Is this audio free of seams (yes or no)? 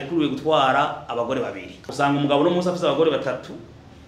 no